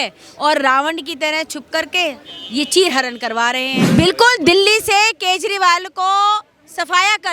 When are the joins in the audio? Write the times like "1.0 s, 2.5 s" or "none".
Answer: 3.8 s